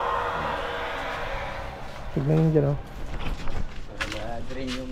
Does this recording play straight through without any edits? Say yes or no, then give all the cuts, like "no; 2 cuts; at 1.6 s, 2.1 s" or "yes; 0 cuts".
yes; 0 cuts